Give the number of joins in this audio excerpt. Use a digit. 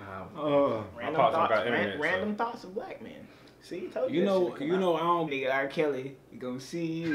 1